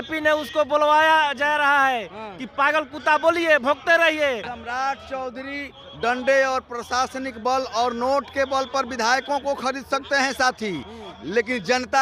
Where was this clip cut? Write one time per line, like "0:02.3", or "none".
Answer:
0:04.5